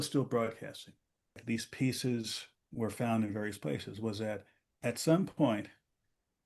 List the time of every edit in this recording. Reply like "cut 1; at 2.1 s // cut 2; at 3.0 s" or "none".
cut 1; at 1.4 s